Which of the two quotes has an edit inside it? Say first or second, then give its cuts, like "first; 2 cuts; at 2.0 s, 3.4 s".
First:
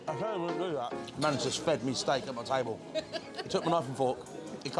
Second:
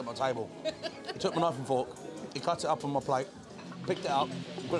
first; 1 cut; at 1.0 s